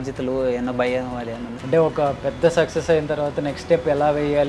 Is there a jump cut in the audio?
yes; 1 cut; at 1.5 s

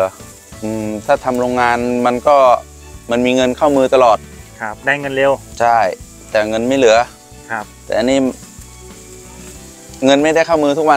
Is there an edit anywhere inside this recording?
no; 0 cuts

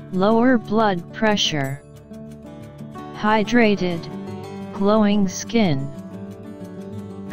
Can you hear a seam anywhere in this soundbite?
no; 0 cuts

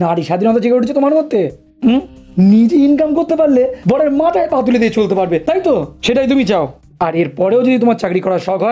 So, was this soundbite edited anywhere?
yes; 1 cut; at 6.8 s

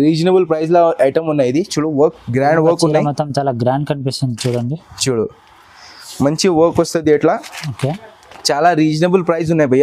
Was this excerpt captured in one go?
yes; 0 cuts

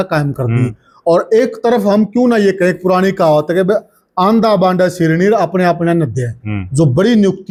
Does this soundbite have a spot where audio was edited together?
no; 0 cuts

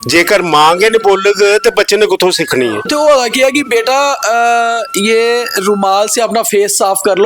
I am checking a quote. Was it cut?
yes; 1 cut; at 2.9 s

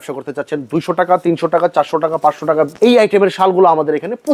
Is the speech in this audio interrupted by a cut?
yes; 1 cut; at 2.7 s

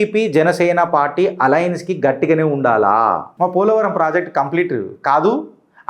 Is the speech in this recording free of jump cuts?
no; 1 cut; at 3.3 s

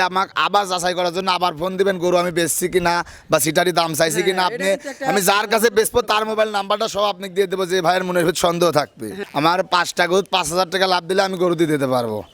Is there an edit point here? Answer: yes; 1 cut; at 9.2 s

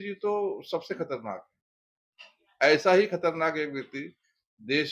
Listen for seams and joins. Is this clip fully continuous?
yes; 0 cuts

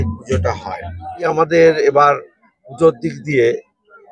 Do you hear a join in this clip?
yes; 1 cut; at 1.3 s

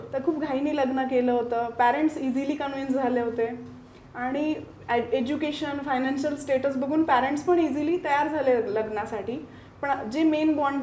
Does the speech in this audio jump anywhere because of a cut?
no; 0 cuts

